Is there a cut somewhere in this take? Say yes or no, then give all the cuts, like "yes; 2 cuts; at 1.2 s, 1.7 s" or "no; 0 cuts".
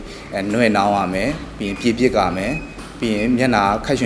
no; 0 cuts